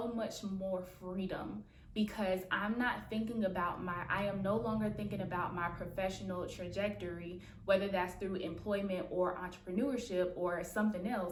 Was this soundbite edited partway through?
no; 0 cuts

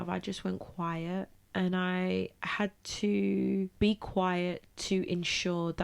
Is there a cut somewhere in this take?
yes; 2 cuts; at 1.4 s, 3.7 s

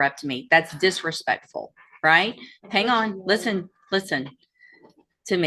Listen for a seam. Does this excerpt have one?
no; 0 cuts

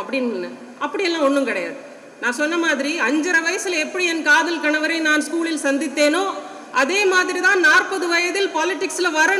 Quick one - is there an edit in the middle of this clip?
no; 0 cuts

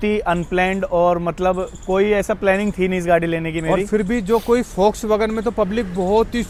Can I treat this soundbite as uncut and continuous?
yes; 0 cuts

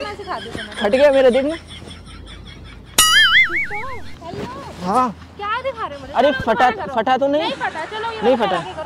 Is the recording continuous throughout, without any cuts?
yes; 0 cuts

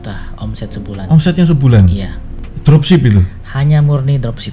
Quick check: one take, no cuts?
yes; 0 cuts

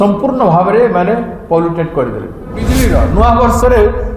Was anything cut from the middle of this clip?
yes; 1 cut; at 2.6 s

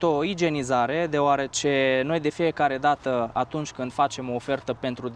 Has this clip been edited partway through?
no; 0 cuts

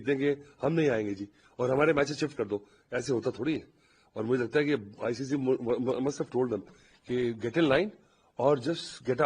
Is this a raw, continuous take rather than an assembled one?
yes; 0 cuts

